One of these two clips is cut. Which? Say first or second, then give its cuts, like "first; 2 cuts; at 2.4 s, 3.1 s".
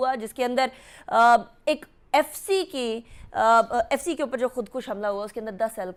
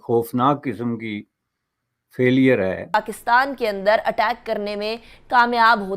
second; 1 cut; at 2.9 s